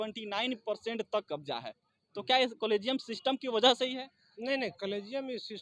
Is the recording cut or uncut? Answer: uncut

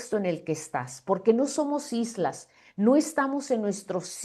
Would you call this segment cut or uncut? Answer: uncut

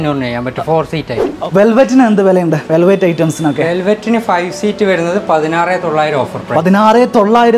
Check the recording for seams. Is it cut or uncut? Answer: cut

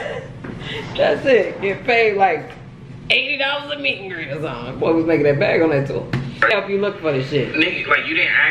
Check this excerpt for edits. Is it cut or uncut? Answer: cut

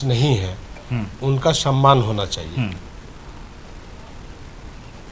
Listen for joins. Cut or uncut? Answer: uncut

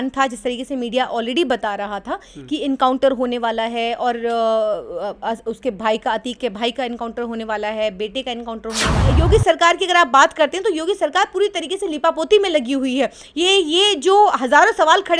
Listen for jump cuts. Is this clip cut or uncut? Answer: cut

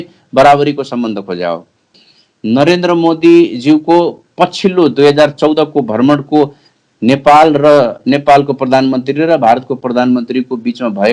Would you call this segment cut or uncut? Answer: cut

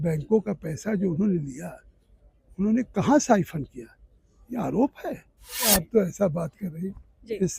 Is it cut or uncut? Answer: cut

